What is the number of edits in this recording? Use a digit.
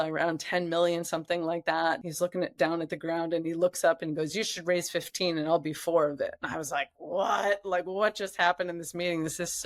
1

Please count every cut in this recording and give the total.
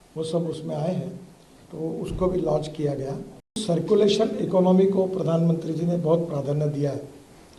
1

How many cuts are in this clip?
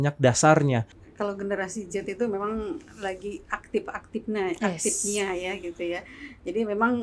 1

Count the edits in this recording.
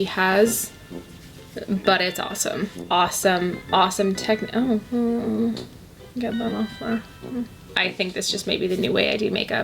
2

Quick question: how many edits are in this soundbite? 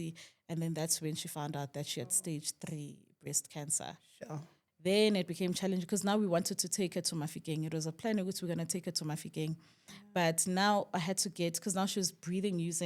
1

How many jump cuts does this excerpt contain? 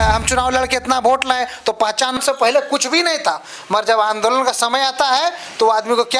1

